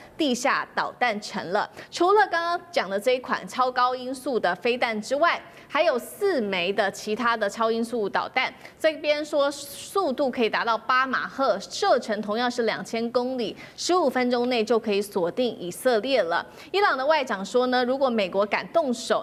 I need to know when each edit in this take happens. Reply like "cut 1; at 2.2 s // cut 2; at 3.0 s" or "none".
none